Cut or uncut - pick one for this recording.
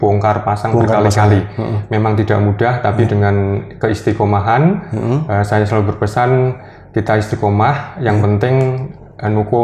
uncut